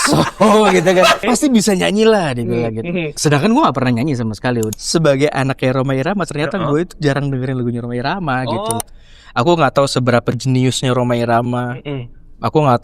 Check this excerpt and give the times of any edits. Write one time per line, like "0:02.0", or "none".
0:01.2
0:03.1
0:04.8
0:08.8